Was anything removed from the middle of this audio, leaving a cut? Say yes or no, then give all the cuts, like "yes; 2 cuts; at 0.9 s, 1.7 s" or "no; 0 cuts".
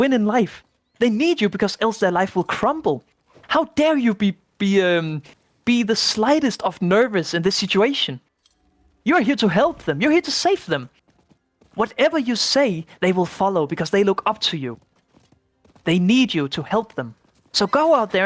no; 0 cuts